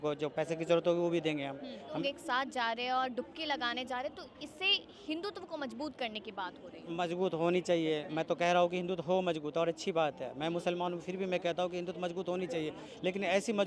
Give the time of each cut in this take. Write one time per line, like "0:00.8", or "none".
0:01.9

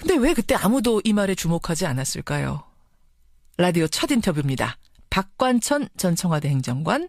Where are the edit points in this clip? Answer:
0:04.7

